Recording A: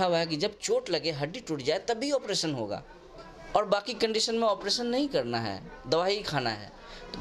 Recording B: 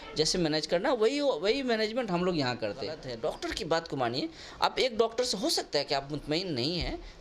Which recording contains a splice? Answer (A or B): B